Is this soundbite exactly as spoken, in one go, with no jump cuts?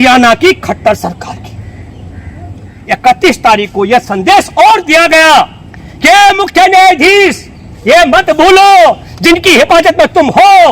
no; 1 cut; at 2.7 s

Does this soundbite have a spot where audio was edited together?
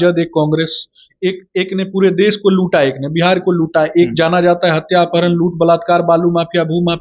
no; 0 cuts

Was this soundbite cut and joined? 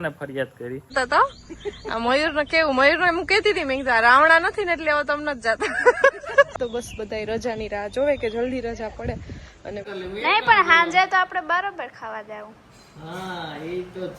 yes; 3 cuts; at 0.9 s, 6.5 s, 9.8 s

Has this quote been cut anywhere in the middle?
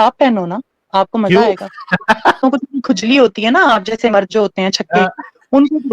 yes; 1 cut; at 2.4 s

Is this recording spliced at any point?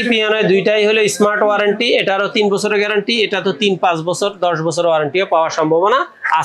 no; 0 cuts

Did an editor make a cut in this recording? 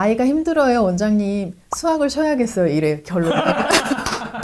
no; 0 cuts

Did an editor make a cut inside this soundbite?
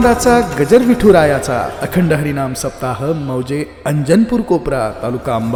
no; 0 cuts

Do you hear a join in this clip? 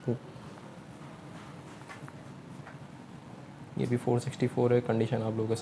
no; 0 cuts

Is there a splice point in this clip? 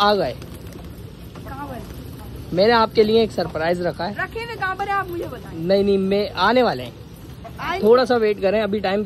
no; 0 cuts

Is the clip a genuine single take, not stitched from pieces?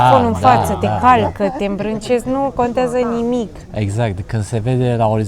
yes; 0 cuts

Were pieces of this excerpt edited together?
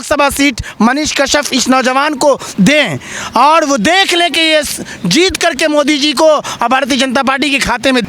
no; 0 cuts

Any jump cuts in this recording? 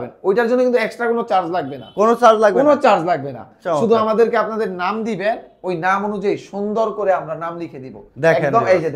no; 0 cuts

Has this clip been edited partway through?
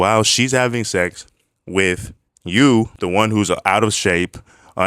yes; 1 cut; at 3.0 s

